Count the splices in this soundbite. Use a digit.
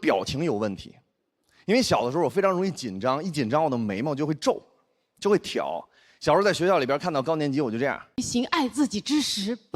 1